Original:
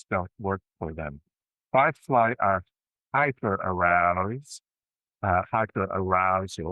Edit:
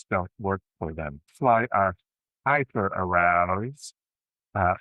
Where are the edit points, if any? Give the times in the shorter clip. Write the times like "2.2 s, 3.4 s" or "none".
1.3 s